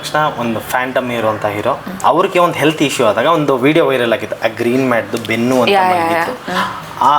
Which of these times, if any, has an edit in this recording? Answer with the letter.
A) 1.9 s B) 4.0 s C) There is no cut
A